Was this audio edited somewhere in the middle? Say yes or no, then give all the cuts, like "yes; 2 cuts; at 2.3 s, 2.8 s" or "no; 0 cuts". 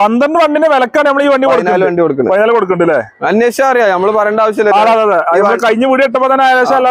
no; 0 cuts